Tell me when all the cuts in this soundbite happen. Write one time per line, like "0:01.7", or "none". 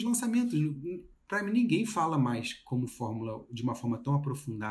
none